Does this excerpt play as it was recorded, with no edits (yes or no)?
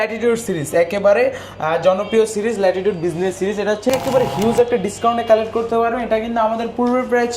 no